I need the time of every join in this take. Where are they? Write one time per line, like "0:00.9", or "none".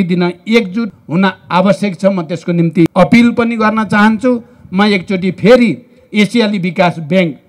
0:01.0
0:02.9